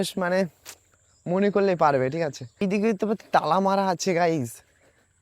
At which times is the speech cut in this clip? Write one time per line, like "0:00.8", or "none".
0:02.6